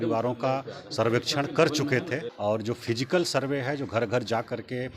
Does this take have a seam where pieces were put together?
yes; 1 cut; at 2.3 s

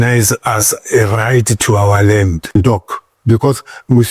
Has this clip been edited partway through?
yes; 1 cut; at 2.5 s

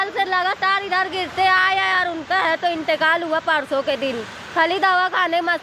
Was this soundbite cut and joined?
no; 0 cuts

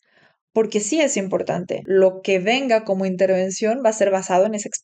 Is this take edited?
yes; 1 cut; at 1.7 s

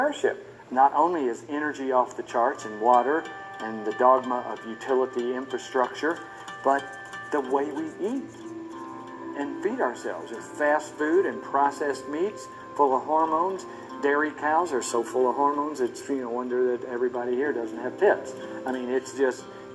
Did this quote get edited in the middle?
no; 0 cuts

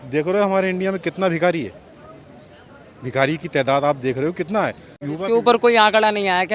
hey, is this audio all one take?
no; 1 cut; at 5.0 s

